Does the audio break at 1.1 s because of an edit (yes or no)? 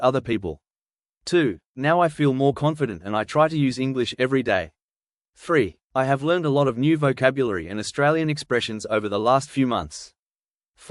no